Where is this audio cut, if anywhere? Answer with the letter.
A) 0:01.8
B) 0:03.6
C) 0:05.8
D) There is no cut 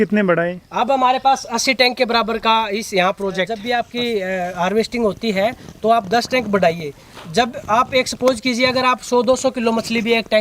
B